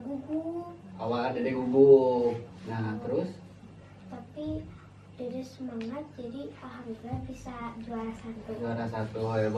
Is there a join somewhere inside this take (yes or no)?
no